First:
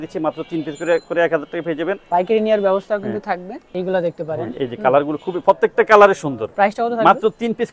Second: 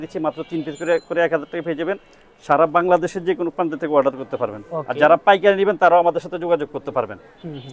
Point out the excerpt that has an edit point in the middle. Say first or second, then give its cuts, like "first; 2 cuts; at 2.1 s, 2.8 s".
first; 3 cuts; at 2.0 s, 3.6 s, 6.4 s